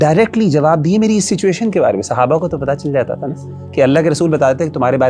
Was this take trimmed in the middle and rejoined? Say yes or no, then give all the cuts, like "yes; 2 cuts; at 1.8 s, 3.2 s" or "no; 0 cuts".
no; 0 cuts